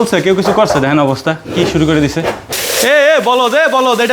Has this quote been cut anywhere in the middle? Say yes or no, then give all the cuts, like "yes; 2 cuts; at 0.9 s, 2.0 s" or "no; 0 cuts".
yes; 1 cut; at 2.4 s